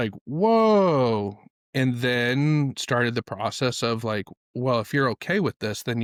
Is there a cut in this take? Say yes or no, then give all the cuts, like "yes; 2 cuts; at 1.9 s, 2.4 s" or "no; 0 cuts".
no; 0 cuts